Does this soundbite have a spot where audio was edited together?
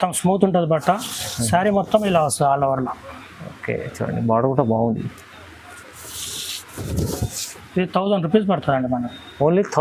no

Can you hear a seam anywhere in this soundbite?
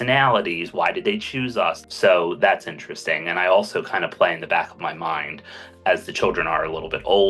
yes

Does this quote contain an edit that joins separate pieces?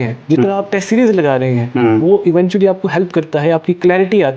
no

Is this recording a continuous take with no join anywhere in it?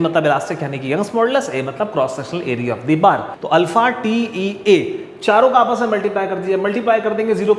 no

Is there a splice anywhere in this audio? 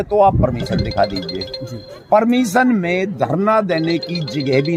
no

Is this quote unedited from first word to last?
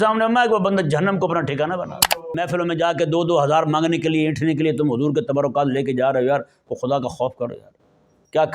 no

